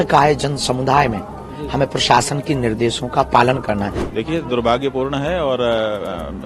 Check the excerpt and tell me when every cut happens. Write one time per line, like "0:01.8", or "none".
0:04.0